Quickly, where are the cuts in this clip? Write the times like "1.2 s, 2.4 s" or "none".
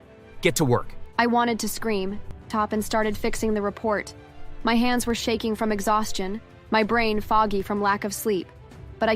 2.5 s